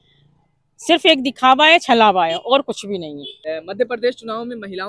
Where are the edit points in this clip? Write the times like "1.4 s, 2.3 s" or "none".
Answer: 3.3 s